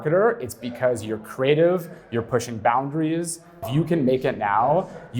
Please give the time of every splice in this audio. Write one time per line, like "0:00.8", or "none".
0:03.6